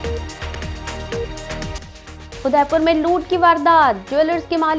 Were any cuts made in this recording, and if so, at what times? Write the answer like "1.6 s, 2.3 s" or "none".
1.7 s